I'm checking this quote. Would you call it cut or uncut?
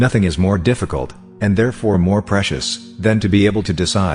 uncut